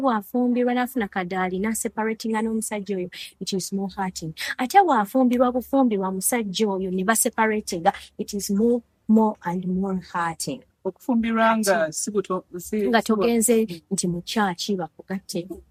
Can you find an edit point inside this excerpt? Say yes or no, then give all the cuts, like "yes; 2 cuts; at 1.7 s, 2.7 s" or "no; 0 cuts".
no; 0 cuts